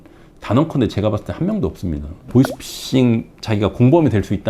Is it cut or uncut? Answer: cut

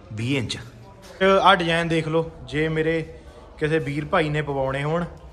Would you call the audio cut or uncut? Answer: cut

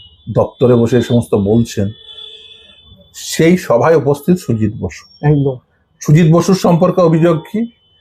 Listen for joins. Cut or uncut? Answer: uncut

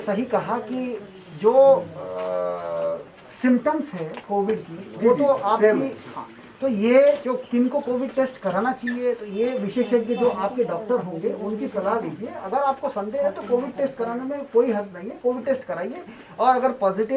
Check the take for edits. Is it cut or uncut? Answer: uncut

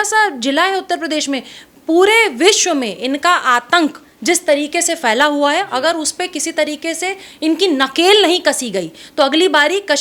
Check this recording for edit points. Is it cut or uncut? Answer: uncut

